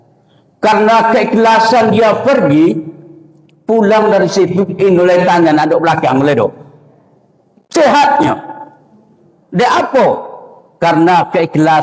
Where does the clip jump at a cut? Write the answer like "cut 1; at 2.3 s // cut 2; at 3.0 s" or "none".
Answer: none